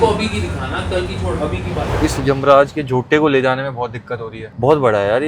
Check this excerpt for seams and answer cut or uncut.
cut